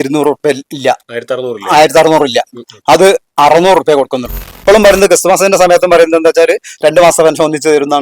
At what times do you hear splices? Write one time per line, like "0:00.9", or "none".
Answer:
0:04.5